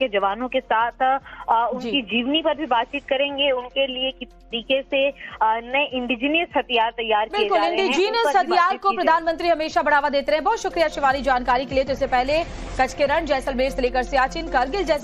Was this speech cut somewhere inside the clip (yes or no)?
no